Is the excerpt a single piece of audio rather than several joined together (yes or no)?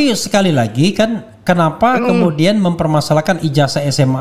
yes